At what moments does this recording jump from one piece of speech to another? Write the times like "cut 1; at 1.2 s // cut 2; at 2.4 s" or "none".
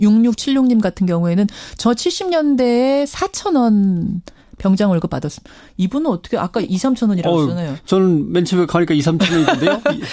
cut 1; at 7.1 s